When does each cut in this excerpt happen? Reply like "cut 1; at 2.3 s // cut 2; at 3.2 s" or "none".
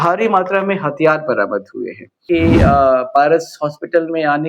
cut 1; at 2.2 s